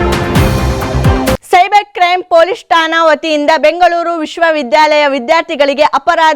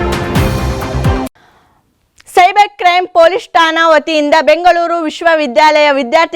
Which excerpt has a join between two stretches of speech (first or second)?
first